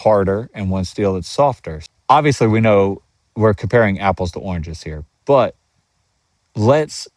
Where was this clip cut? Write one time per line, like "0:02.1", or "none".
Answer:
0:01.7